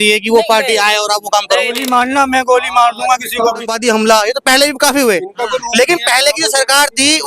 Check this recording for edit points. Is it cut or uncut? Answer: cut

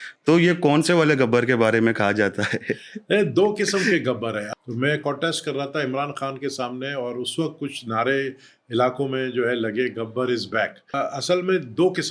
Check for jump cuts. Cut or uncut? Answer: cut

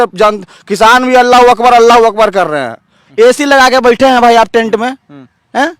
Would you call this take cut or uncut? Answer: cut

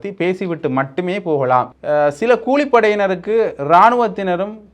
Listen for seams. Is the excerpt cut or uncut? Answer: cut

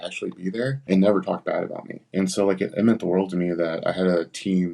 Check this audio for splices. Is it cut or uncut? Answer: cut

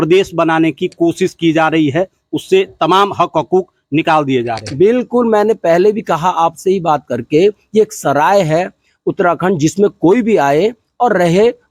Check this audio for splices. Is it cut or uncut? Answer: uncut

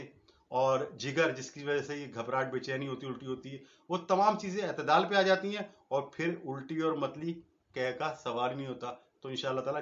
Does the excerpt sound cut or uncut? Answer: uncut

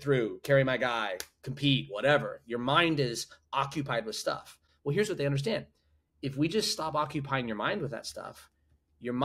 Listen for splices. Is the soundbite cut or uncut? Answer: uncut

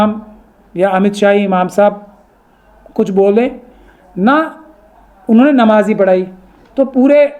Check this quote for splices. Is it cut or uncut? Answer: uncut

